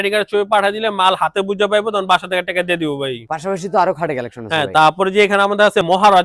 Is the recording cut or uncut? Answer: uncut